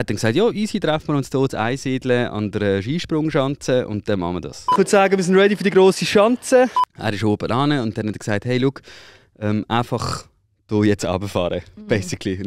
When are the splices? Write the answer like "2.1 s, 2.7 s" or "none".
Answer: 4.7 s, 6.9 s